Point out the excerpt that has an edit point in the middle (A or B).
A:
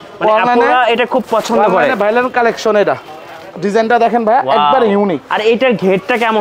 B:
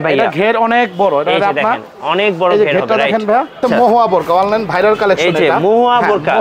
B